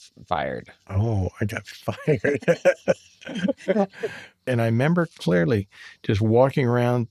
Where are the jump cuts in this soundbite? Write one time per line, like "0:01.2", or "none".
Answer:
0:04.4